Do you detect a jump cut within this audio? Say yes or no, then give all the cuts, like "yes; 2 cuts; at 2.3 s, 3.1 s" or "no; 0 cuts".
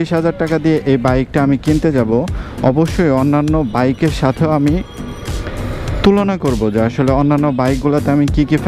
no; 0 cuts